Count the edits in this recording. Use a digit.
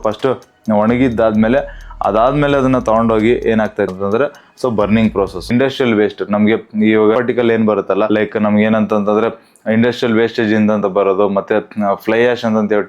1